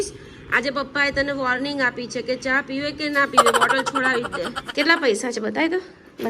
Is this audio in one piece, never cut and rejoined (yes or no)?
no